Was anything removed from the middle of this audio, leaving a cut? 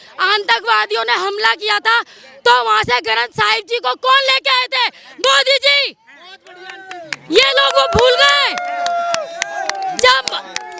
no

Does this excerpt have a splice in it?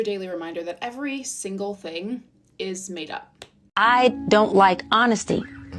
yes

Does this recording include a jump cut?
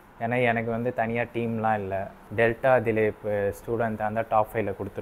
yes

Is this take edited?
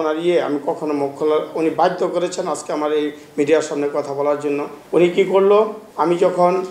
no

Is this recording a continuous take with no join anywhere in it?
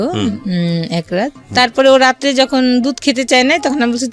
no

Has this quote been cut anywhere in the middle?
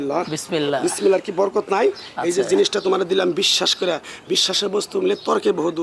no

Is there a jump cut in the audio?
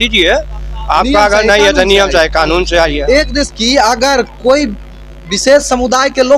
yes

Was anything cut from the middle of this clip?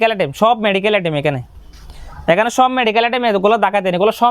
no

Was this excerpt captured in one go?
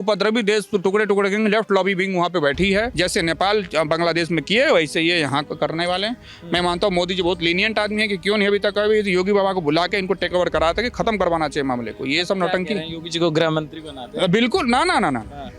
no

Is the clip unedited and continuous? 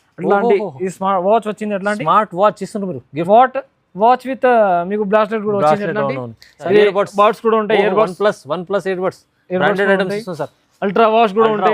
no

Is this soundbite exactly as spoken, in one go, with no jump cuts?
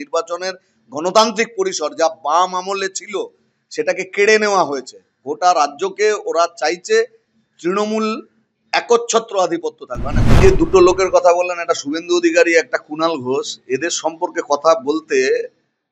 no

